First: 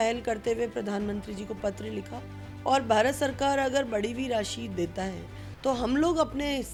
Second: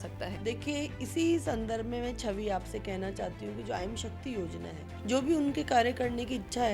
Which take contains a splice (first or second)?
second